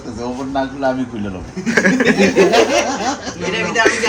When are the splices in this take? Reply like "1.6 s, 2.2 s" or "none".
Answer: none